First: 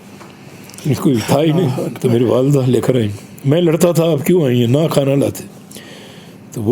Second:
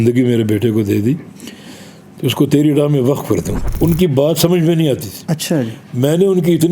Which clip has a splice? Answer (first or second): second